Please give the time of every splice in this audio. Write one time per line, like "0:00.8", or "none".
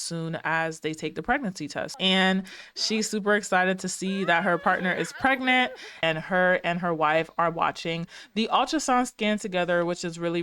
0:01.9
0:06.0

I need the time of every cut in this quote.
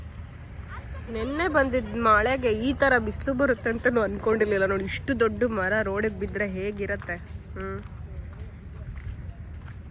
none

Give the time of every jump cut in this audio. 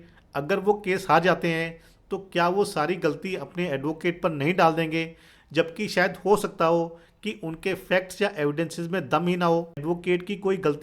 0:09.8

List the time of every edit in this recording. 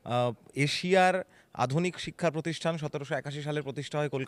none

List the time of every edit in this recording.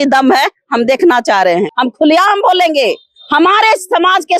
0:01.7

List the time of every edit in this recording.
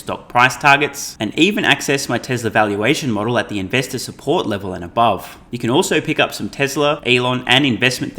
0:05.4
0:07.0

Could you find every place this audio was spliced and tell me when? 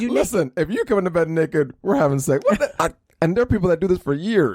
0:02.7

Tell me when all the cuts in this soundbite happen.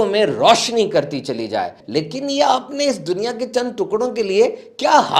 0:01.8

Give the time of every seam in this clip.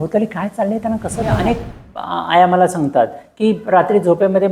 0:01.4

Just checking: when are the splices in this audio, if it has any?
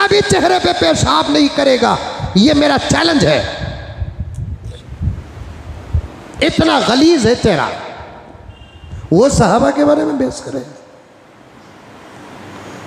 none

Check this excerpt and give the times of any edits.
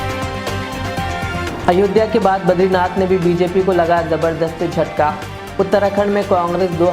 0:01.4

